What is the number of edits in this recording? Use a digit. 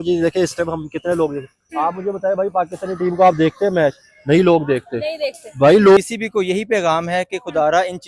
1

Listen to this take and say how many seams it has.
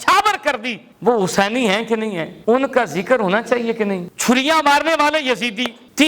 2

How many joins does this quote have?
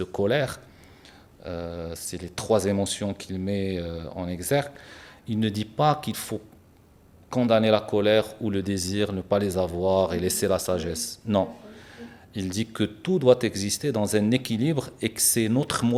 0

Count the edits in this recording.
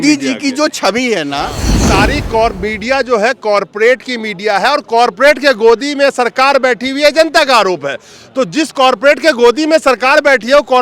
1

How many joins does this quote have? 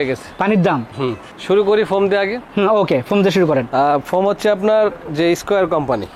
0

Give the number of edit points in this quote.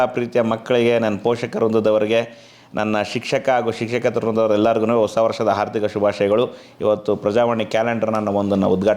1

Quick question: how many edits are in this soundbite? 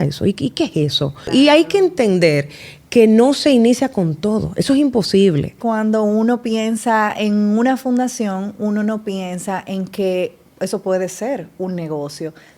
2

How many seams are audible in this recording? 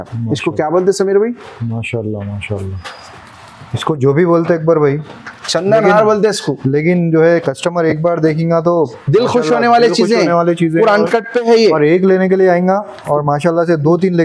0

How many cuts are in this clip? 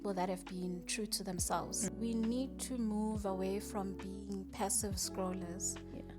1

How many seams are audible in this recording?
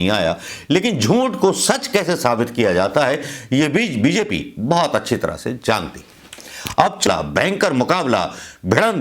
1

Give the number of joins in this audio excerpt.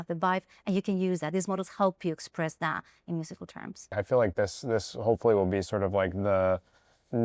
1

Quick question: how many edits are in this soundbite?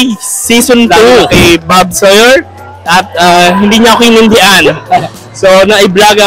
1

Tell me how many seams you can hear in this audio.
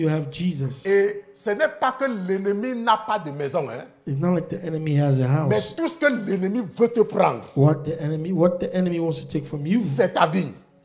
0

